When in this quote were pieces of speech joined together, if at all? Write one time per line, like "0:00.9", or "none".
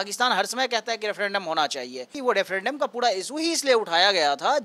0:02.1